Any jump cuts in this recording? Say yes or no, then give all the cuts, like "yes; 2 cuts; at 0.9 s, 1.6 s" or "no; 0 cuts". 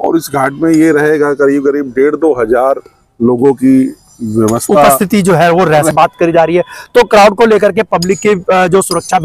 yes; 1 cut; at 5.9 s